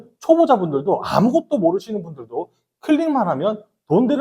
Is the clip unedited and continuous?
yes; 0 cuts

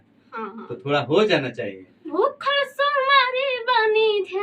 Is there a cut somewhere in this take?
yes; 1 cut; at 2.1 s

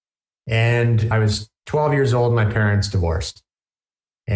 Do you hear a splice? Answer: yes; 1 cut; at 1.1 s

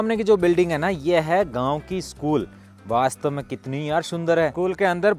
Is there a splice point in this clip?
no; 0 cuts

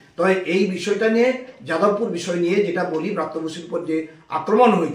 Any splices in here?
no; 0 cuts

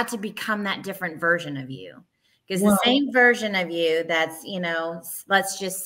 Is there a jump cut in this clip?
no; 0 cuts

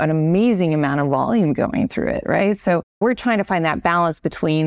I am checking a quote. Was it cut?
yes; 1 cut; at 3.0 s

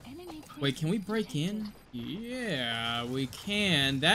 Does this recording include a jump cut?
yes; 1 cut; at 1.8 s

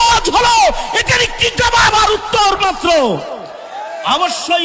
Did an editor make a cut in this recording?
no; 0 cuts

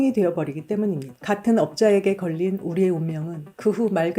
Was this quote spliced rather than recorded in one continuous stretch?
yes; 1 cut; at 1.1 s

